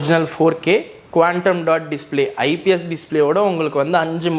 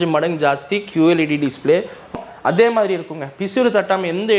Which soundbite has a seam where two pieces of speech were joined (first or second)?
second